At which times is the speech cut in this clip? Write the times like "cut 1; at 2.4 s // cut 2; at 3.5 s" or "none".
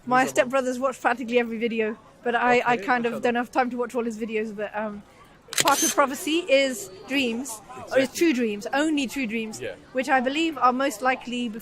cut 1; at 5.6 s